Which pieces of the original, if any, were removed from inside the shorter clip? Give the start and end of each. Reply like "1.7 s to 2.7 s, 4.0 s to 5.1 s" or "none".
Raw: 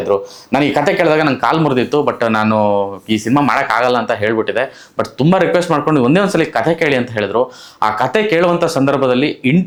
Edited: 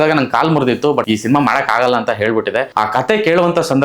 2.1 s to 3.1 s, 4.7 s to 7.7 s